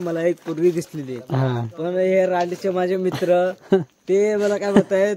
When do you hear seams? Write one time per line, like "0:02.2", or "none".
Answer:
none

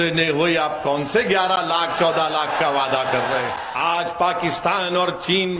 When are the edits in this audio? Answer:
0:03.6

